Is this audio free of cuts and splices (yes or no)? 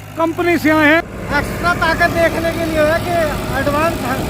no